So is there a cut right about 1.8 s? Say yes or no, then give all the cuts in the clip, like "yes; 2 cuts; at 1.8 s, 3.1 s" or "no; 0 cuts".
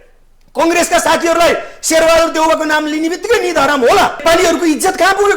no; 1 cut; at 4.2 s